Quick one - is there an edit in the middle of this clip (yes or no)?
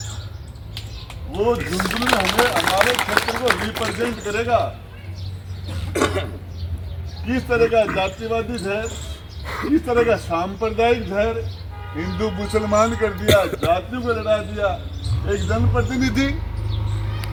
no